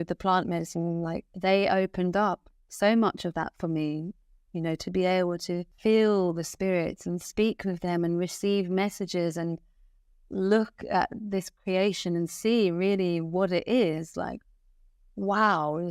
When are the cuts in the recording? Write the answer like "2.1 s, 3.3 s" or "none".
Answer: 1.3 s, 5.7 s